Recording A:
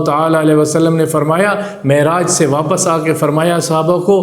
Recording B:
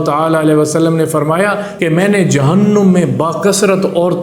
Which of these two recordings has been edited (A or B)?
B